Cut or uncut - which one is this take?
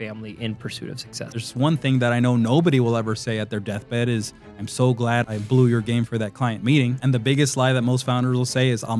cut